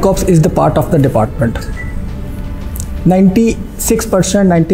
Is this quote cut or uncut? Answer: uncut